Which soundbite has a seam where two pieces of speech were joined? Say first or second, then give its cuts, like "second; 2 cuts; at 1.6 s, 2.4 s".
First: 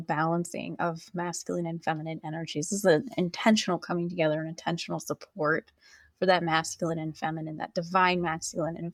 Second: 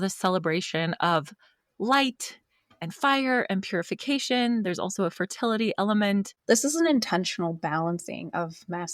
second; 1 cut; at 6.3 s